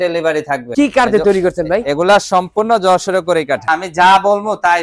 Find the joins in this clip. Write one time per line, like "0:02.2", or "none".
0:00.7
0:03.7